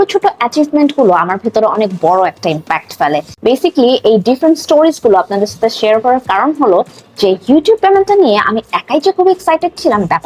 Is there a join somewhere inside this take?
yes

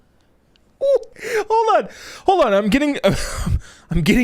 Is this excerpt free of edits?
no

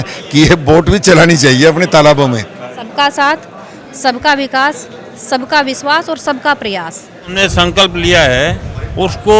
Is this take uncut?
no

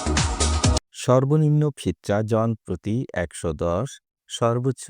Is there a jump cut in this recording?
yes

